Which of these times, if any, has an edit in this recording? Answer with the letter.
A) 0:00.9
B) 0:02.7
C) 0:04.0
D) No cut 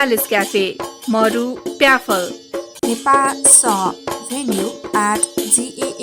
B